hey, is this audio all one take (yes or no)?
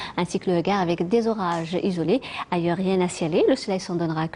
no